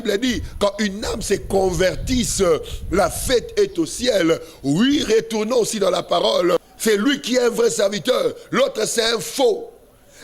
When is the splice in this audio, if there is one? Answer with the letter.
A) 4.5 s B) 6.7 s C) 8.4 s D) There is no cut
B